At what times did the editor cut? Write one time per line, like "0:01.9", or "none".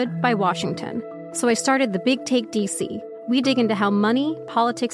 0:01.2
0:03.1